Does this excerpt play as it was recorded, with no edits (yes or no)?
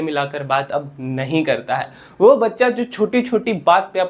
yes